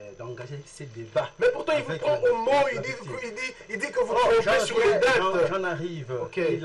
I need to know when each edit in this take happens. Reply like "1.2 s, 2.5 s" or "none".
none